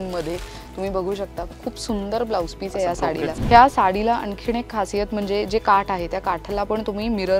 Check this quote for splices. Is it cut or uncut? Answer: cut